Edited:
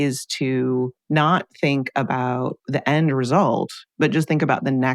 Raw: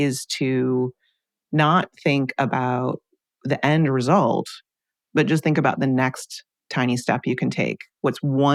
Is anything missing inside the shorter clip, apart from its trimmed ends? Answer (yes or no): yes